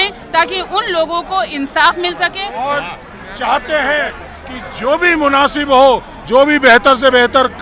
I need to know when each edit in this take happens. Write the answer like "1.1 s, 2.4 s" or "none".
2.5 s